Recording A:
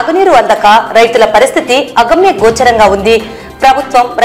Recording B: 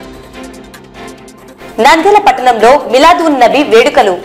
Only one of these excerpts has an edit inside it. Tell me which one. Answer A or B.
B